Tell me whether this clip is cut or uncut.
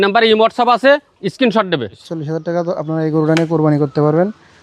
cut